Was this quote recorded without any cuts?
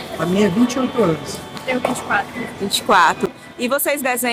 yes; 0 cuts

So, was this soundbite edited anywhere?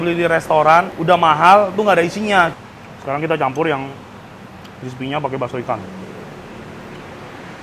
yes; 2 cuts; at 0.9 s, 2.5 s

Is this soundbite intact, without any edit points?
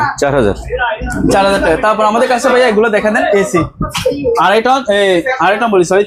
yes; 0 cuts

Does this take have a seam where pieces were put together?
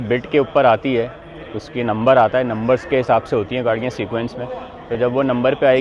no; 0 cuts

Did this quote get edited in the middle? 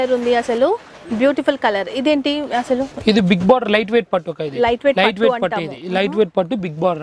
no; 0 cuts

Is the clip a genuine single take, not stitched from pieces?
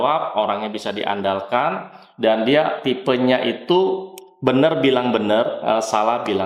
yes; 0 cuts

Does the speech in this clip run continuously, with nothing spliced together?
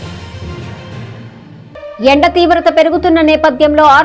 no; 1 cut; at 1.3 s

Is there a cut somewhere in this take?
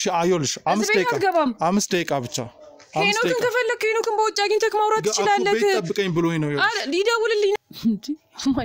yes; 1 cut; at 7.6 s

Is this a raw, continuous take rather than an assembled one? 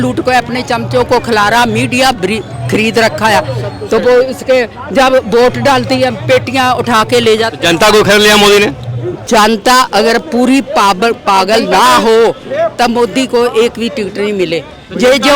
no; 1 cut; at 9.1 s

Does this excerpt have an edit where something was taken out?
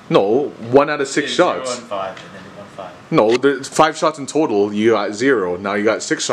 no; 0 cuts

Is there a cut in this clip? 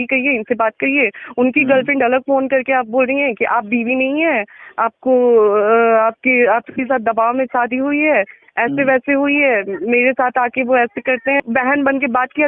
yes; 1 cut; at 11.4 s

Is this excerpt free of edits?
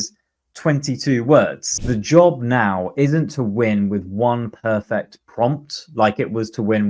no; 1 cut; at 1.6 s

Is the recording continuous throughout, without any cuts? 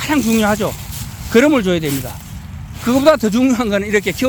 yes; 0 cuts

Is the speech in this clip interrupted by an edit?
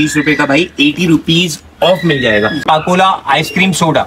yes; 1 cut; at 2.6 s

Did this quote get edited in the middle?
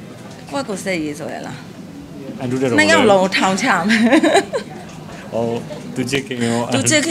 no; 0 cuts

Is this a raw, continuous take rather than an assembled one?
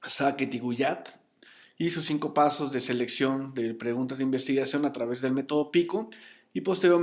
yes; 0 cuts

